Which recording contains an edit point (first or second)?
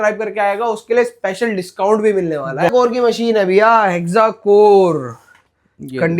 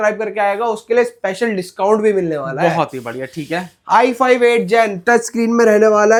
first